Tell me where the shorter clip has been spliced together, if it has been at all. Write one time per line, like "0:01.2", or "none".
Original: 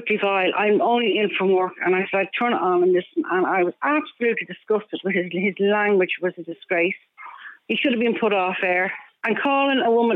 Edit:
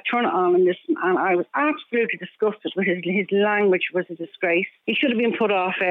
0:04.8